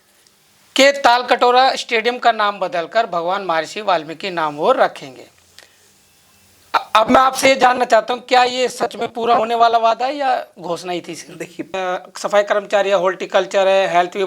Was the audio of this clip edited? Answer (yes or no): yes